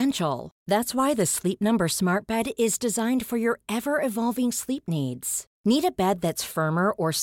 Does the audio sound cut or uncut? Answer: uncut